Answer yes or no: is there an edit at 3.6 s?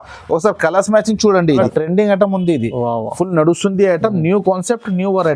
no